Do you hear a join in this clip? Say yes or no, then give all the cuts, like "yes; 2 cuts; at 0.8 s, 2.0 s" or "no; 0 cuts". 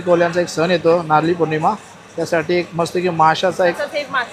no; 0 cuts